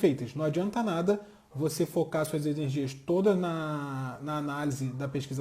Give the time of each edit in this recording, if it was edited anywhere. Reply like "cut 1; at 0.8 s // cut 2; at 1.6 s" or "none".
none